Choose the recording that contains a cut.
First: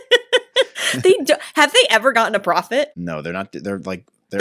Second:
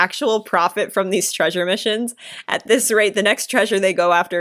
first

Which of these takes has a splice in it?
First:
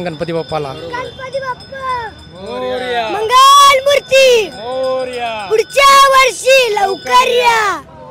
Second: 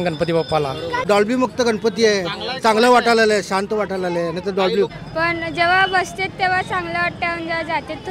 second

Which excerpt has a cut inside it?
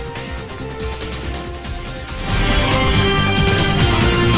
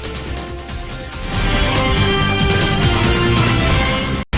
first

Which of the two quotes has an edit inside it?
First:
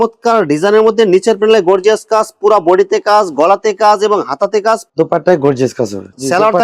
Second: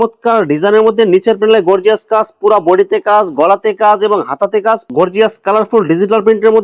second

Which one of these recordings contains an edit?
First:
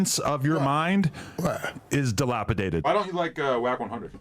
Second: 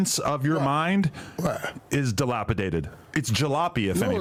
first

